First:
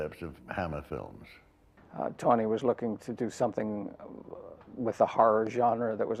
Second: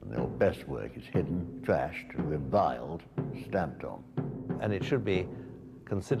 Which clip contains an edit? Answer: second; 1 cut; at 4.6 s

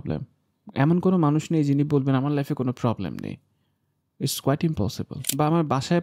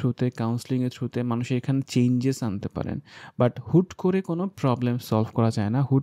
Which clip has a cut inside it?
first; 1 cut; at 5.1 s

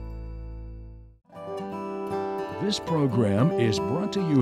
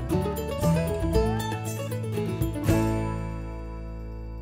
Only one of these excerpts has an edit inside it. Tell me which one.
first; 2 cuts; at 1.4 s, 2.6 s

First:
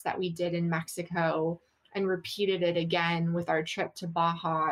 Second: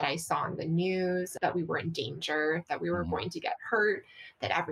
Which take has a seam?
second; 1 cut; at 1.3 s

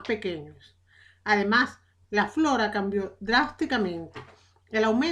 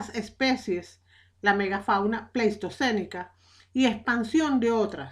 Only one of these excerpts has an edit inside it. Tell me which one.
second; 1 cut; at 2.5 s

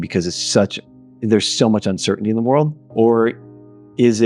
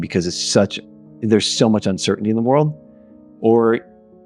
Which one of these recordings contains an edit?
first; 1 cut; at 2.8 s

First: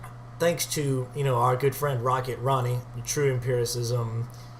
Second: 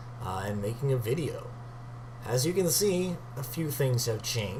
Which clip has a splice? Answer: first; 1 cut; at 1.1 s

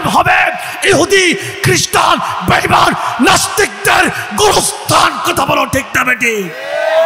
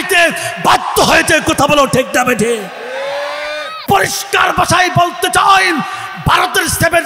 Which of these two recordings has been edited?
second; 1 cut; at 3.8 s

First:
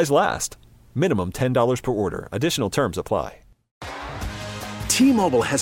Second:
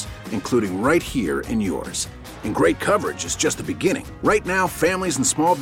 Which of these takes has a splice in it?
first; 1 cut; at 3.6 s

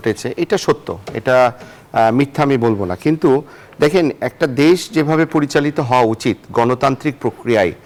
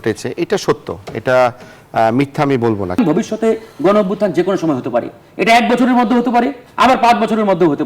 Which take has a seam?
second; 1 cut; at 3.0 s

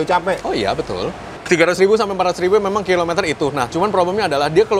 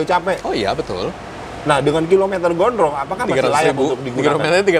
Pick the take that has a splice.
first; 1 cut; at 1.4 s

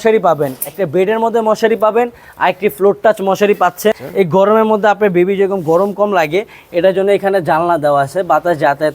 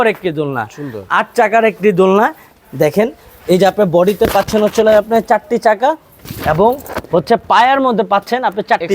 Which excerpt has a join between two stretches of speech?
first; 1 cut; at 4.0 s

